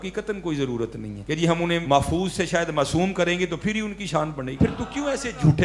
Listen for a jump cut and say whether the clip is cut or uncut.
cut